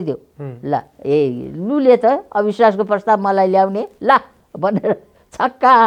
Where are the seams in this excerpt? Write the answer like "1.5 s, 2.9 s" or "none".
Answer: none